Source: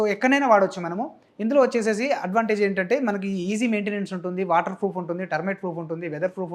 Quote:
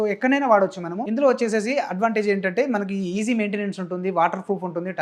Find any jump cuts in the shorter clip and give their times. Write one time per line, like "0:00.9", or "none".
0:00.9